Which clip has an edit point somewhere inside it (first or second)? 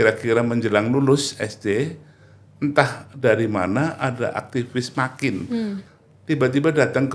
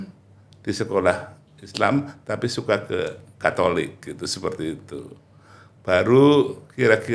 first